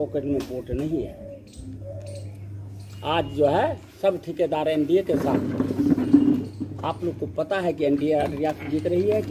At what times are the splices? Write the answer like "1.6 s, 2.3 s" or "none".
none